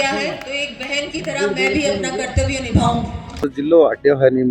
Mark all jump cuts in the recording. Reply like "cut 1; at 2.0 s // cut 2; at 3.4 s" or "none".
cut 1; at 3.5 s